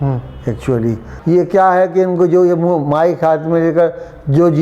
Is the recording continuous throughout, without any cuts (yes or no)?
no